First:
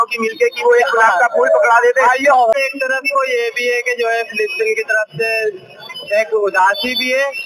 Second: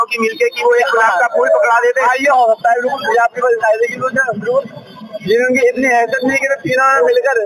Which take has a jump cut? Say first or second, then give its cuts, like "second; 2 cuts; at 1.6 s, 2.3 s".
first; 1 cut; at 2.6 s